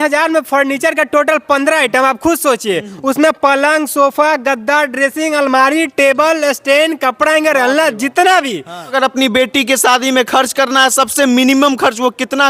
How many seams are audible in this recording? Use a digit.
1